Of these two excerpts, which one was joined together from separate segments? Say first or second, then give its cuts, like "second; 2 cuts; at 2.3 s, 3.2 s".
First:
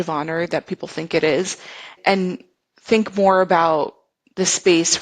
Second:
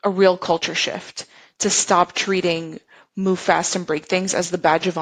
first; 1 cut; at 1.9 s